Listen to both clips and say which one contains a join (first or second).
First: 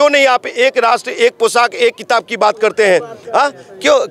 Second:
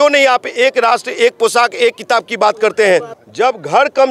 second